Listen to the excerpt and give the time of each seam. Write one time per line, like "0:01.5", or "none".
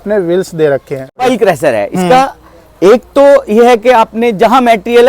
0:01.2